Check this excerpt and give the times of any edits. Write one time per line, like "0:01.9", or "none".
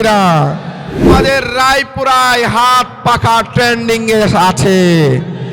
0:01.1